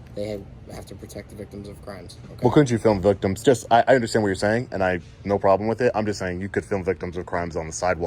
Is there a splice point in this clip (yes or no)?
no